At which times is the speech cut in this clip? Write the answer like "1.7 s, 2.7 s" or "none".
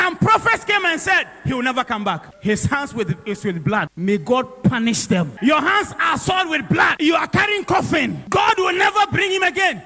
2.3 s, 3.9 s, 5.3 s, 6.9 s, 8.2 s

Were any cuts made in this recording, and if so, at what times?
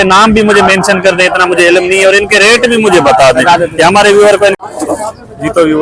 4.6 s

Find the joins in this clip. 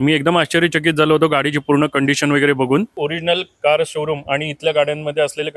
2.9 s

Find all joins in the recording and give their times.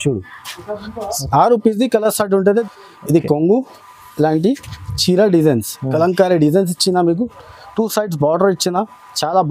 2.6 s

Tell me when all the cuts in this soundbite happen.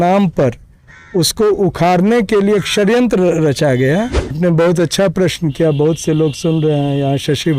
4.4 s

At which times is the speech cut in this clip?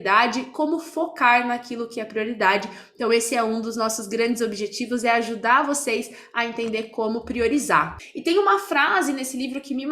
8.0 s

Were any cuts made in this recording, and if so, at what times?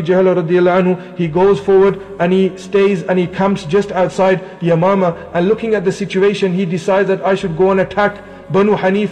none

